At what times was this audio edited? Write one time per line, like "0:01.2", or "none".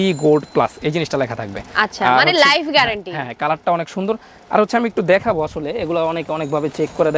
none